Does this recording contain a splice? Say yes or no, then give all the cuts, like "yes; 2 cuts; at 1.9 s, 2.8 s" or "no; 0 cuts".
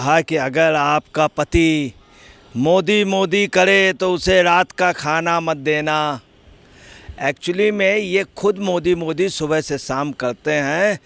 no; 0 cuts